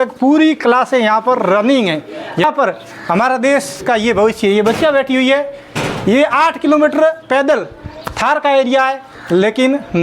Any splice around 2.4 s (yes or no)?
yes